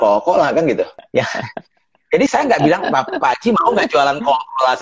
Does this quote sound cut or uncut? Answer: cut